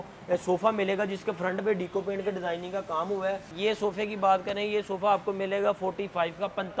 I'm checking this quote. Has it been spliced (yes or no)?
yes